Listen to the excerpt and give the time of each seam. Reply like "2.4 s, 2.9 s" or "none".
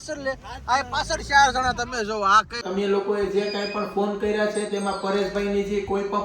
2.6 s